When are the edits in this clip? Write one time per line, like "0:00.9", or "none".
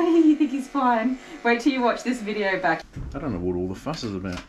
0:02.9

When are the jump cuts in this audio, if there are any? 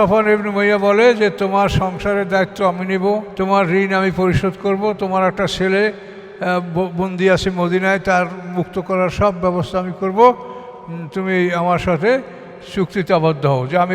0:03.3

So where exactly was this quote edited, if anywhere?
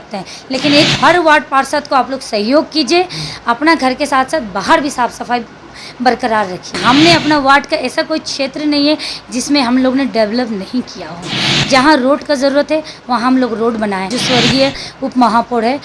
0:06.8
0:14.2

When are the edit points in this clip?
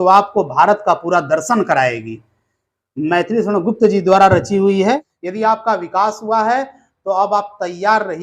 0:05.2

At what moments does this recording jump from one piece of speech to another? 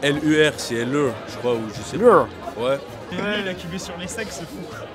0:03.1

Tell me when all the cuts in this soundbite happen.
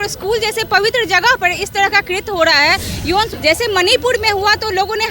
0:03.3

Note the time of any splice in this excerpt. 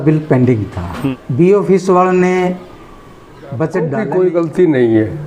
0:01.0
0:04.0

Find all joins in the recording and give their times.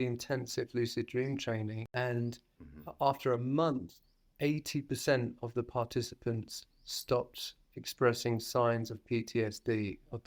0:01.8

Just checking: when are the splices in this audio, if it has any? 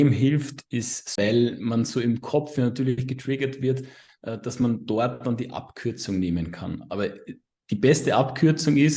0:01.0

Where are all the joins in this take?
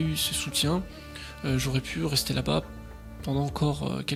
none

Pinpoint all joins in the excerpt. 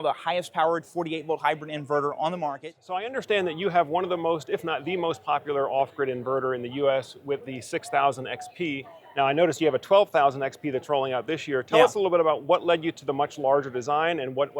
0:03.1

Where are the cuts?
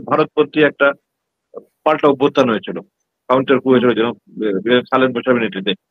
none

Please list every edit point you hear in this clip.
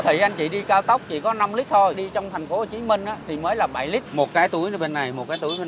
0:02.0
0:03.2
0:04.1

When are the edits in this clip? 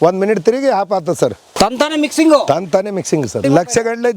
0:01.4
0:03.4

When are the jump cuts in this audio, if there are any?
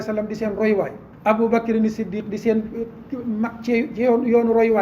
0:01.0

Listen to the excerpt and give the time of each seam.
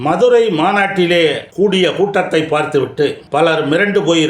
0:01.4
0:03.2

